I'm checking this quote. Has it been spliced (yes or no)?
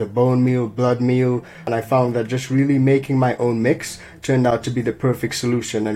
yes